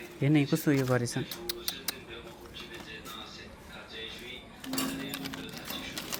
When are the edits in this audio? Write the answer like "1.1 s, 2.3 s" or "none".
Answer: none